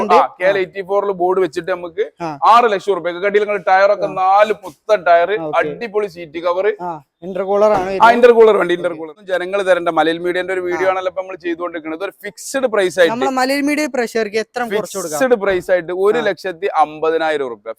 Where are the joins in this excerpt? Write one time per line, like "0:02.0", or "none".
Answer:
0:09.0